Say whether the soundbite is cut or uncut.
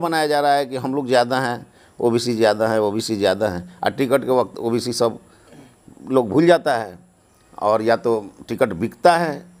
uncut